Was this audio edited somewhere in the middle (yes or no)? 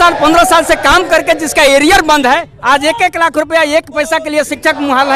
no